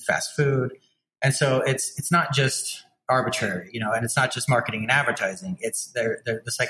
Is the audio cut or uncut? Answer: uncut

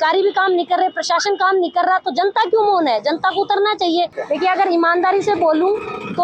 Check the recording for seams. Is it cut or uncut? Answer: cut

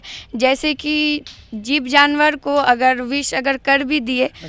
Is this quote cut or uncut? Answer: uncut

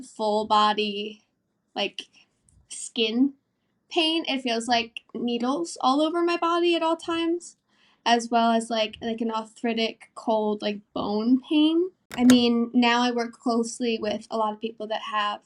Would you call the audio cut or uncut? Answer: cut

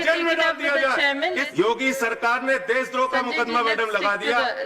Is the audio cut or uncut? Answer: cut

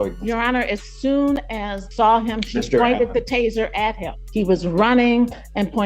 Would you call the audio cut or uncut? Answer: cut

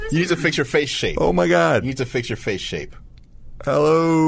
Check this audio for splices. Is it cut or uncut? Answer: uncut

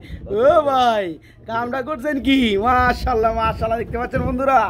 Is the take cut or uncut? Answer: uncut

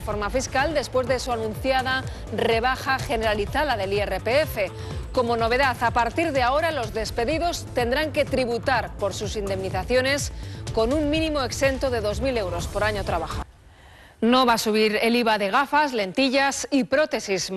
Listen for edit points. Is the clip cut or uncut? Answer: uncut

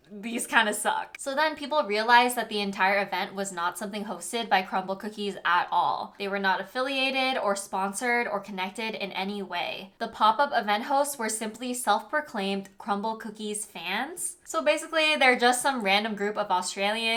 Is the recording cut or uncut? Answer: uncut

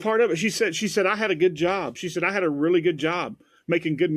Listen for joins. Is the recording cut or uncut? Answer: uncut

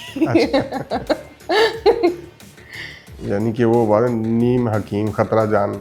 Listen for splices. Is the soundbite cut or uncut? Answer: uncut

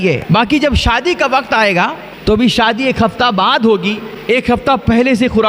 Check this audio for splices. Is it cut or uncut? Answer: cut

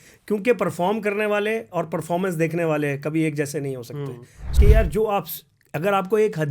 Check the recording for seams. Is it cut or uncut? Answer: cut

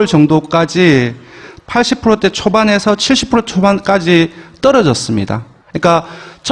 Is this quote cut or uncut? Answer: cut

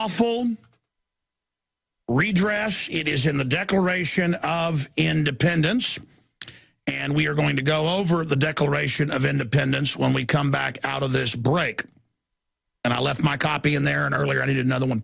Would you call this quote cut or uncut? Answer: uncut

